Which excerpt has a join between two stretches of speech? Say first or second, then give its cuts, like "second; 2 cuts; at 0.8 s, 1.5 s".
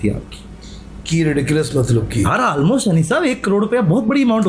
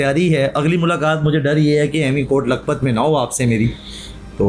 first; 1 cut; at 2.3 s